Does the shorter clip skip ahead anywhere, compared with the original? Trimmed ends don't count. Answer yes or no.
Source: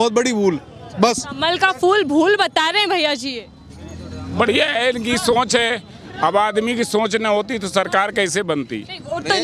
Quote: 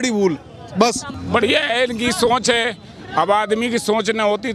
yes